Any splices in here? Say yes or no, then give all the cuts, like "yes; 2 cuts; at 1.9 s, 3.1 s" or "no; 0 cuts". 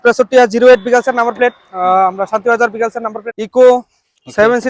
yes; 1 cut; at 3.2 s